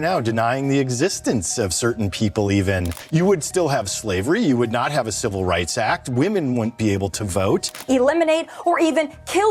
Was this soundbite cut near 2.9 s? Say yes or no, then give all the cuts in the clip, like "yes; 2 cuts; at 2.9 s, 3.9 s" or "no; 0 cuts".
yes; 2 cuts; at 2.9 s, 7.8 s